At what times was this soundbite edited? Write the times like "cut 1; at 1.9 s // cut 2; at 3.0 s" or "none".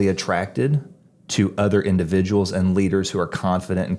none